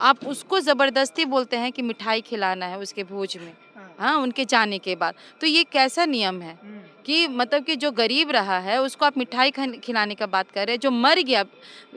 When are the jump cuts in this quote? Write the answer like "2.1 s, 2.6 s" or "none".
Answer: none